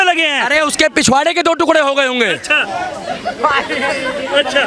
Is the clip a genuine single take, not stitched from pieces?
yes; 0 cuts

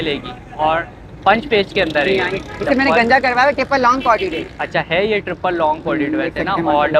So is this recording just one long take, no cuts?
yes; 0 cuts

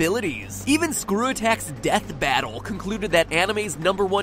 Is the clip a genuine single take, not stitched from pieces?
no; 1 cut; at 1.0 s

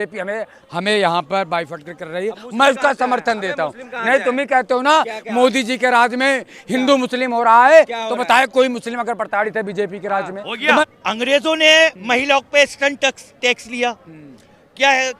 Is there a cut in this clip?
yes; 1 cut; at 10.8 s

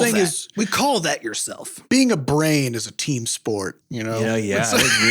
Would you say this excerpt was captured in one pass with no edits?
no; 2 cuts; at 1.9 s, 3.9 s

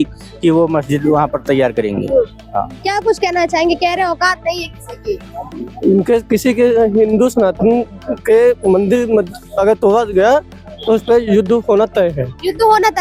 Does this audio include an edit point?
no; 0 cuts

